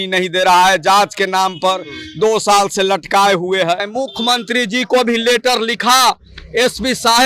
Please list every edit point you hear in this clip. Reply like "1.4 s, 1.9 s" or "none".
3.9 s